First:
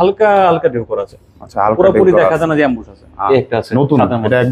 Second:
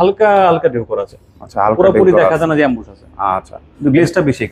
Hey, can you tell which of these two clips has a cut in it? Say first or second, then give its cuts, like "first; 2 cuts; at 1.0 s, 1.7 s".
first; 1 cut; at 3.2 s